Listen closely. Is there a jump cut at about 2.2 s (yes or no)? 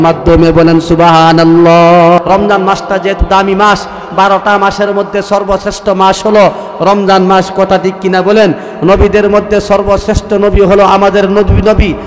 yes